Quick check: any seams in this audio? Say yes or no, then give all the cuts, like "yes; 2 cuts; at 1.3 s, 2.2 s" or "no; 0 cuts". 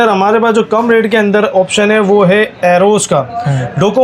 no; 0 cuts